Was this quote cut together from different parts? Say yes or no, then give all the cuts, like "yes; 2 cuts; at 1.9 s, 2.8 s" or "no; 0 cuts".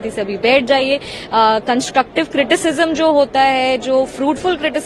no; 0 cuts